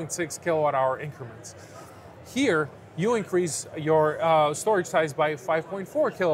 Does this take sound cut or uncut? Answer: uncut